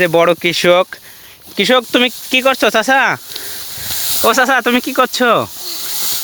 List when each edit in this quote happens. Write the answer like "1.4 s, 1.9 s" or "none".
none